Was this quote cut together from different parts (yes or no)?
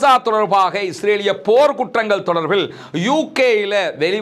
no